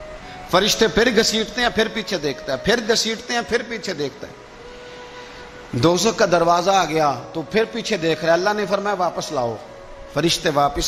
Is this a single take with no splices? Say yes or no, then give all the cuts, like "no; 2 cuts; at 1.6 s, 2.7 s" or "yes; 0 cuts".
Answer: yes; 0 cuts